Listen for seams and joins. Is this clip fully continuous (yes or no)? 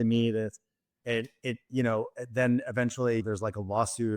no